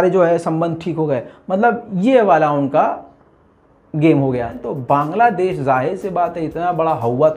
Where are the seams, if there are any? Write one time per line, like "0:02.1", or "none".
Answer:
0:04.6

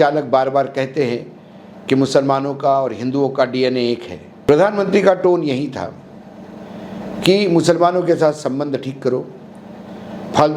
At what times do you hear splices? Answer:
0:04.3

